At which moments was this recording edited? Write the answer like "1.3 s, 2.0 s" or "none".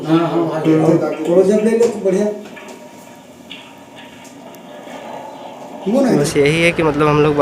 6.2 s